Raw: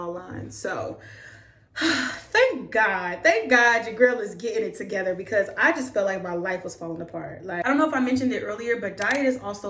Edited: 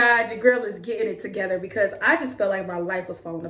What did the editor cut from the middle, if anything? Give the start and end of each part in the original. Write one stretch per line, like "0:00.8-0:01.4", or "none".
none

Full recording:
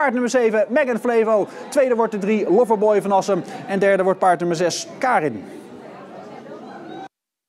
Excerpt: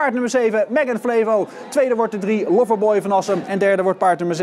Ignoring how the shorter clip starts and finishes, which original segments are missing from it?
0:03.5-0:03.7

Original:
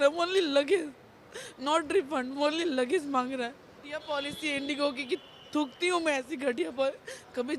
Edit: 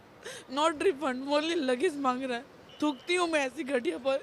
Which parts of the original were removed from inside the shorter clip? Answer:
0:03.7-0:05.3

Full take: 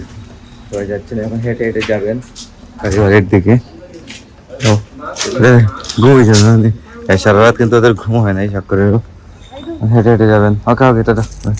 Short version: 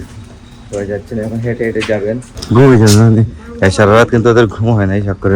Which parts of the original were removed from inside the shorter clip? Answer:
0:02.3-0:05.8

